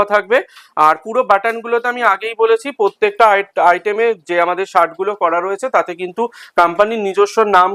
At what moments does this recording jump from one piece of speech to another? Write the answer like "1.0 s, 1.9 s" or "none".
none